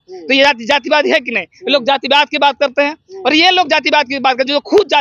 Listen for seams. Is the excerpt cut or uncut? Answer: uncut